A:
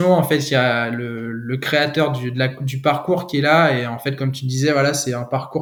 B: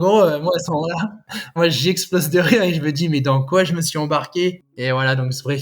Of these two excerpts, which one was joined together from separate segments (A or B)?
B